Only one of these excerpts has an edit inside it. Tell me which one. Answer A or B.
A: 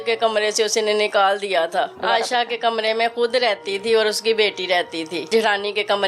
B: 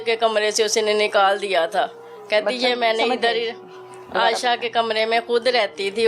A